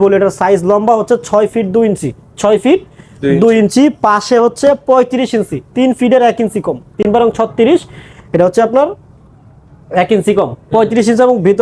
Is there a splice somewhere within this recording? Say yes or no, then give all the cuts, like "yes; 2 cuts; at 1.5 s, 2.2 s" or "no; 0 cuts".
no; 0 cuts